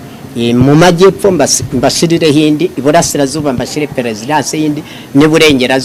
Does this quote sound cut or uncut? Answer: uncut